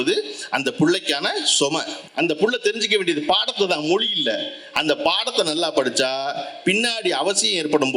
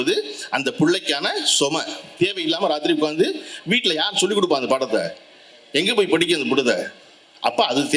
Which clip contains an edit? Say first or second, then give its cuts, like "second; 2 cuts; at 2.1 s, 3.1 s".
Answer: first; 1 cut; at 2.0 s